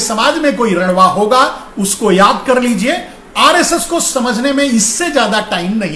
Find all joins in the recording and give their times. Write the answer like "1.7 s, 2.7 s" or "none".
none